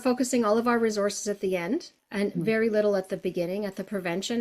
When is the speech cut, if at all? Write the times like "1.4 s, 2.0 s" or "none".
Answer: 2.0 s